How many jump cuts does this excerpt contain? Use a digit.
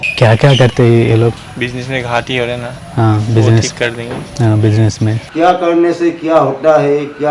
2